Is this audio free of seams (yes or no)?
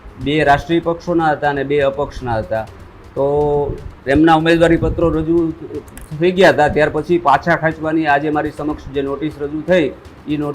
yes